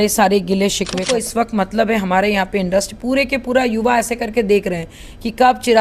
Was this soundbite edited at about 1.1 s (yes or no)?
yes